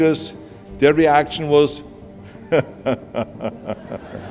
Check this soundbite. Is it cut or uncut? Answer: uncut